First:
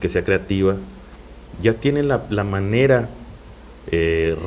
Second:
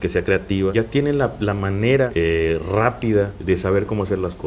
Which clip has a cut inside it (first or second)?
second